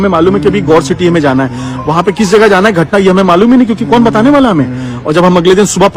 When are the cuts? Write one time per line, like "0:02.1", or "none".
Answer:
none